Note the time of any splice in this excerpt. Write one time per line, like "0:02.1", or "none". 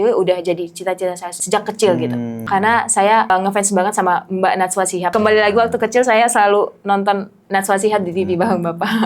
0:01.3
0:02.4
0:03.3
0:05.1
0:07.4

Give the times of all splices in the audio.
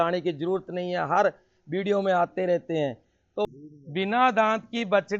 0:03.5

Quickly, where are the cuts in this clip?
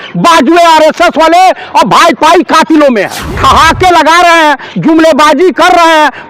0:03.2

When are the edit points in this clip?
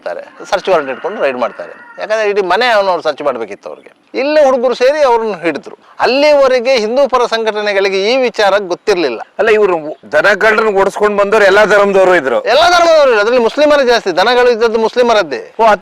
0:04.0

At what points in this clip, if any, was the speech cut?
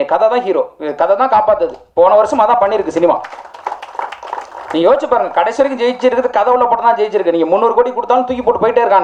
none

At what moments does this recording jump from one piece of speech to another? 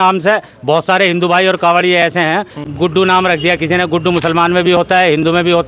0:02.7

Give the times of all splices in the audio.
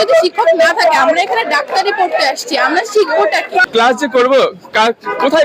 0:03.7

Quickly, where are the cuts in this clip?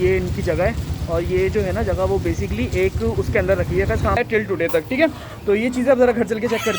0:04.2

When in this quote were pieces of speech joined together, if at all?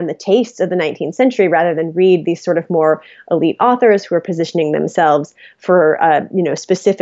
none

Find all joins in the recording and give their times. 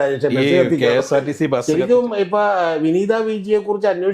0:01.6

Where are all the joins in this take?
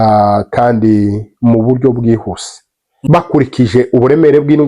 0:02.9

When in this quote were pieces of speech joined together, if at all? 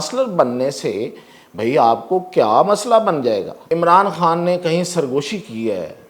0:03.6

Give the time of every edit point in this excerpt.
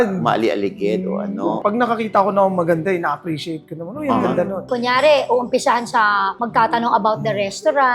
0:01.6
0:04.6

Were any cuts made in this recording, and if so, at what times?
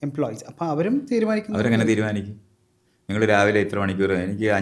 none

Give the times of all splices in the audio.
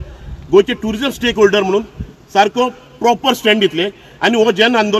none

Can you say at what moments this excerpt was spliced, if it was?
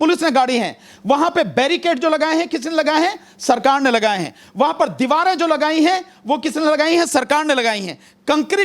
none

